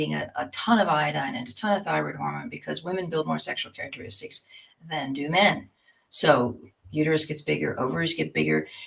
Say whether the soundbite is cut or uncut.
uncut